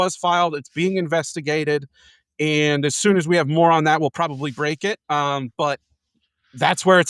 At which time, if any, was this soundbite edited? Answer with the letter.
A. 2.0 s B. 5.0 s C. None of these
C